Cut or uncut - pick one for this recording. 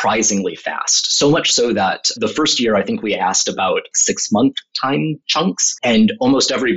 cut